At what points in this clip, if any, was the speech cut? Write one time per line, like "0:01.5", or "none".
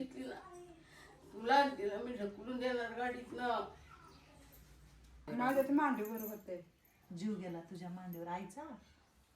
0:05.3

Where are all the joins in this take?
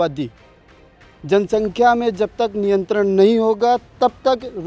none

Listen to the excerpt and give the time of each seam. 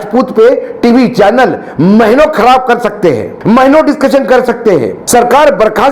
0:03.3
0:05.0

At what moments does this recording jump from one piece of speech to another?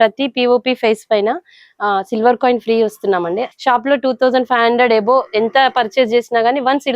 0:03.4

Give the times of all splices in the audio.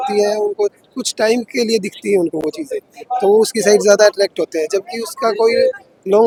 none

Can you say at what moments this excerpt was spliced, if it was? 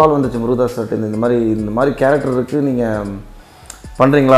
none

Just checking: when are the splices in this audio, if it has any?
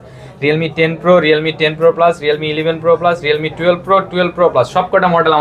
none

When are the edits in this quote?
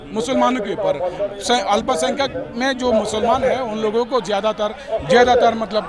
none

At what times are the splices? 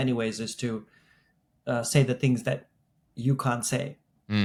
none

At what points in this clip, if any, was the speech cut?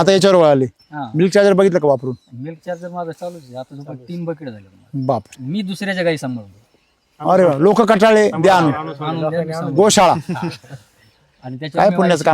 0:05.4

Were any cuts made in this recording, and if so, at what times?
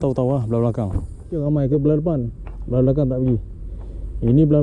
0:01.4

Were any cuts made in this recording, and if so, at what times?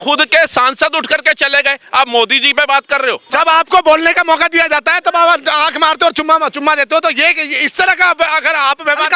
0:03.2

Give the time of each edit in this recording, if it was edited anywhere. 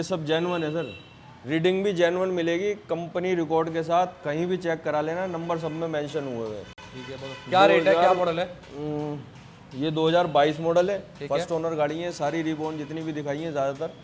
none

